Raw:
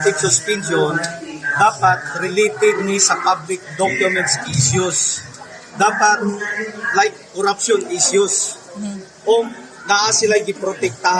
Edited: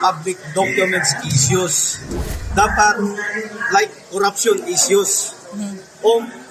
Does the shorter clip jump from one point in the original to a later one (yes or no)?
no